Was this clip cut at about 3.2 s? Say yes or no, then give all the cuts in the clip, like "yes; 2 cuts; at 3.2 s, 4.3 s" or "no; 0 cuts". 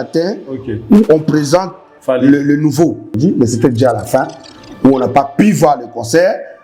yes; 1 cut; at 3.2 s